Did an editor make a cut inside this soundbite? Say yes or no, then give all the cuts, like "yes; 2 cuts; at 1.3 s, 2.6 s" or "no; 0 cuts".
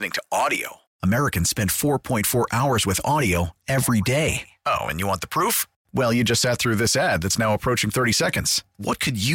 no; 0 cuts